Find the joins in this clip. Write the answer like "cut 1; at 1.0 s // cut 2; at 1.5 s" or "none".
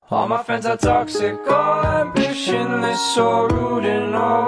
none